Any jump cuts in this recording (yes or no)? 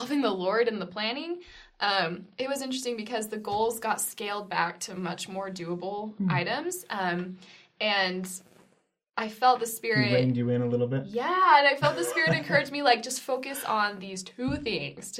no